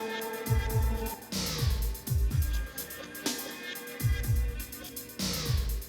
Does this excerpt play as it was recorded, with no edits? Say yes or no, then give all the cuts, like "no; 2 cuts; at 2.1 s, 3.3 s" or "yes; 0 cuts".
no; 1 cut; at 0.9 s